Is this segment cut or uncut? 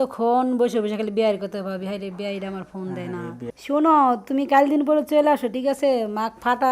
cut